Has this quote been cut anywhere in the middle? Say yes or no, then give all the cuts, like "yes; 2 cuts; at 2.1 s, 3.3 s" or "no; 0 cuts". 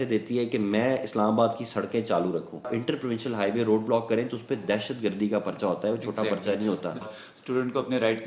yes; 2 cuts; at 2.7 s, 7.0 s